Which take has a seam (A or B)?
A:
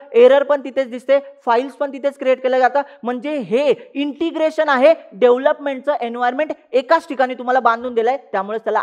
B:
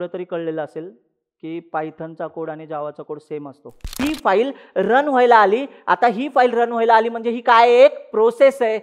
B